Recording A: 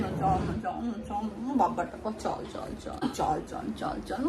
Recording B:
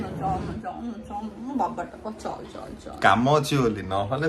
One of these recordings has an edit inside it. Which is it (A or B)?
A